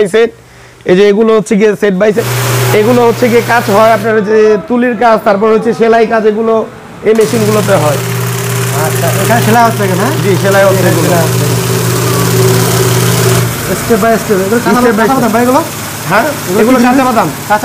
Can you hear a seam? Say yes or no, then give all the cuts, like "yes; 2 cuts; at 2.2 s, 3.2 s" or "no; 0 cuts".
yes; 1 cut; at 2.2 s